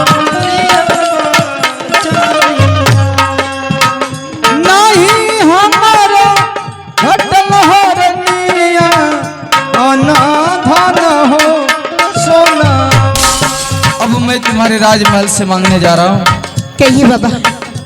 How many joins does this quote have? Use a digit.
1